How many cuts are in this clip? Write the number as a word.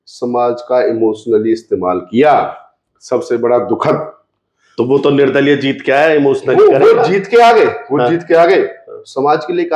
zero